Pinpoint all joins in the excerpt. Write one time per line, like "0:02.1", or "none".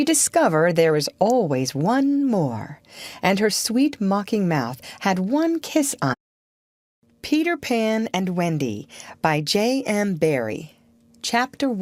none